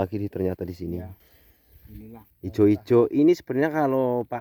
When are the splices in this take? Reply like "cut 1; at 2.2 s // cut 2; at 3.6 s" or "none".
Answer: cut 1; at 2.3 s